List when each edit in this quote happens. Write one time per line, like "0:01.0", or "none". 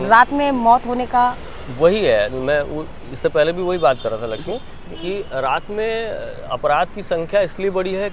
none